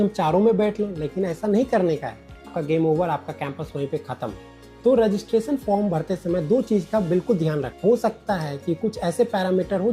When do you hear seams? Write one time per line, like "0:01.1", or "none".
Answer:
0:02.6
0:04.5
0:07.7